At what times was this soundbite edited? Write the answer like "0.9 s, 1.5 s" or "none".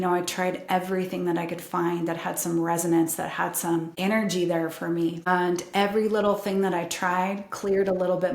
3.9 s, 5.3 s